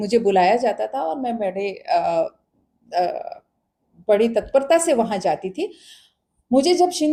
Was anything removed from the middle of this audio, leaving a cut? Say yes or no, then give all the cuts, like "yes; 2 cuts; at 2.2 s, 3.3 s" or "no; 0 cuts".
no; 0 cuts